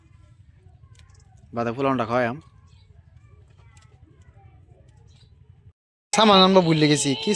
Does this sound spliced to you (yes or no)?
yes